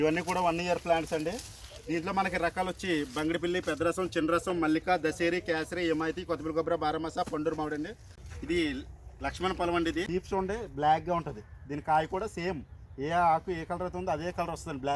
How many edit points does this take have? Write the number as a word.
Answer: two